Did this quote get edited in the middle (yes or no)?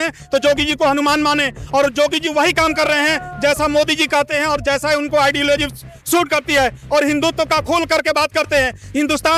no